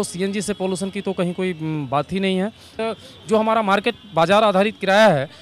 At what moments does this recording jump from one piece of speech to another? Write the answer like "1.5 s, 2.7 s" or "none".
2.8 s